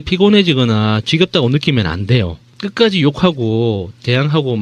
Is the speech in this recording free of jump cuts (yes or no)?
yes